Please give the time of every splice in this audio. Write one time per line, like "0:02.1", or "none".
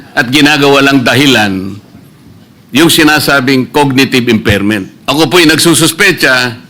0:04.9